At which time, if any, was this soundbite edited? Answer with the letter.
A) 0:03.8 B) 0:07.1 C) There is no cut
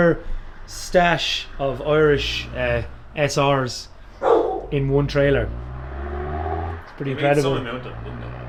C